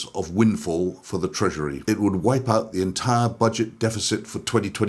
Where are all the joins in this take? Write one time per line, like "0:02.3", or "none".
0:01.8